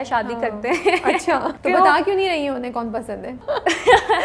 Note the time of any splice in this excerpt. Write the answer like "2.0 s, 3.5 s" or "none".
1.5 s, 3.4 s